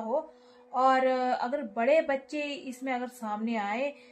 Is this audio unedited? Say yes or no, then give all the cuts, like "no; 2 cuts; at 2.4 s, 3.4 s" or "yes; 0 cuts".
yes; 0 cuts